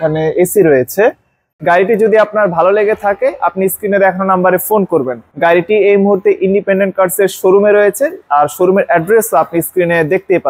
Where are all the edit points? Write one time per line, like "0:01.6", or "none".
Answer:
0:01.5

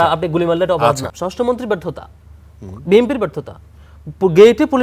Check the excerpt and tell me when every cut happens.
0:01.1

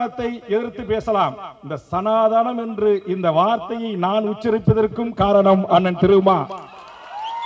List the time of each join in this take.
none

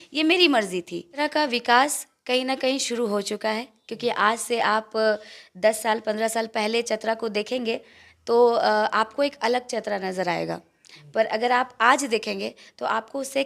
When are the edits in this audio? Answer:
0:01.1

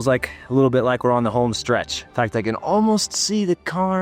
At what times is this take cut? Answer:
0:02.0

